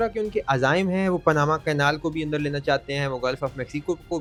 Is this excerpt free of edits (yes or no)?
yes